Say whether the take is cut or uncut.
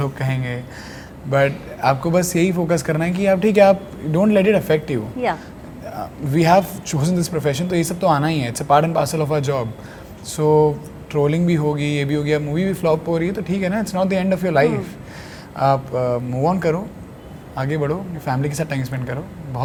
uncut